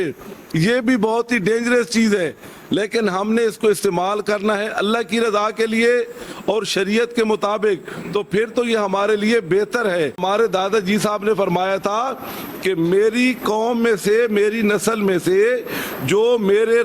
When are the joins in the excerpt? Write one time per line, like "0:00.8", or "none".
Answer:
0:10.2